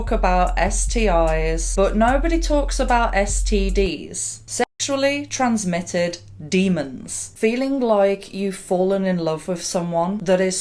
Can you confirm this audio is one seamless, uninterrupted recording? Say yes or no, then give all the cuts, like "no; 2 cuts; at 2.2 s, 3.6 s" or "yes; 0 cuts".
no; 1 cut; at 7.3 s